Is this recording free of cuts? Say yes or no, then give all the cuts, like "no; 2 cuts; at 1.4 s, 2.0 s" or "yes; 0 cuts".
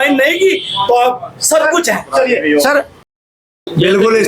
no; 1 cut; at 3.1 s